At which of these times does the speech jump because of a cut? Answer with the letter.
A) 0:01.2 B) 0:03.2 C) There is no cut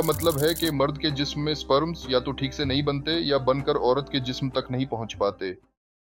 C